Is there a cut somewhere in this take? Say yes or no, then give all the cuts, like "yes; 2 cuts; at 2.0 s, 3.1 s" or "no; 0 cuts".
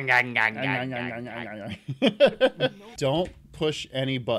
yes; 1 cut; at 2.8 s